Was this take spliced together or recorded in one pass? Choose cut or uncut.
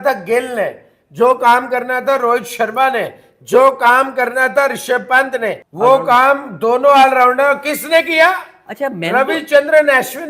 cut